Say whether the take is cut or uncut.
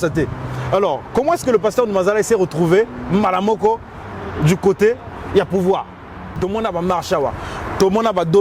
cut